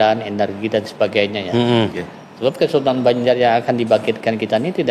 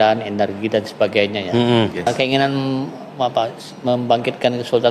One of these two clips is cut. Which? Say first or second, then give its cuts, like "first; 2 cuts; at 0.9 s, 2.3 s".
second; 1 cut; at 2.1 s